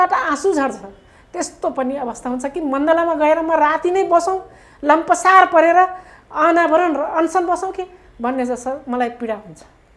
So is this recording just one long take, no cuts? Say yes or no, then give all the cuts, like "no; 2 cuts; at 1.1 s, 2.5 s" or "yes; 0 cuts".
yes; 0 cuts